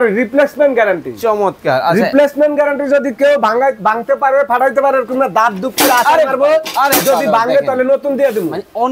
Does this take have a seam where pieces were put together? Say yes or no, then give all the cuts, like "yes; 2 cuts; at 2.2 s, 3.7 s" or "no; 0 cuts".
no; 0 cuts